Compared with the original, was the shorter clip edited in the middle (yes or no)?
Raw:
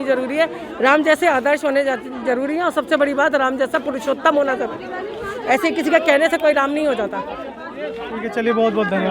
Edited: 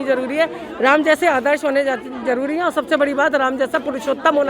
no